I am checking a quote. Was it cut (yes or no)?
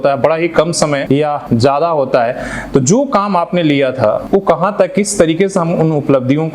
yes